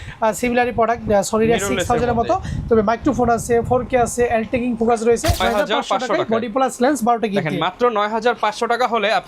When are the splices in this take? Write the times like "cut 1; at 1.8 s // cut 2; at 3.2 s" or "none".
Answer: cut 1; at 5.4 s